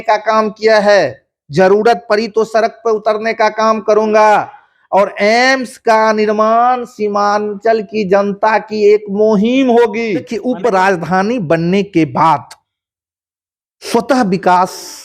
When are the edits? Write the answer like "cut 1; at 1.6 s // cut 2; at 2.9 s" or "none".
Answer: cut 1; at 10.3 s